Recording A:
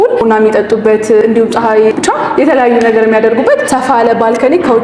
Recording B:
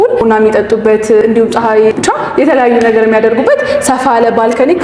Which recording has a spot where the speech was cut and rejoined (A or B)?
A